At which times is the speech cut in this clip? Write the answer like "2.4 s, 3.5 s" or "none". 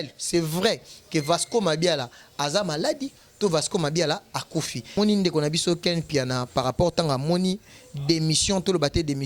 5.0 s